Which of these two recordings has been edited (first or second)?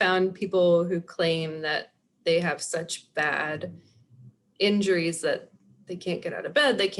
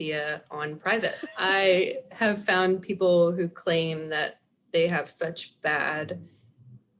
second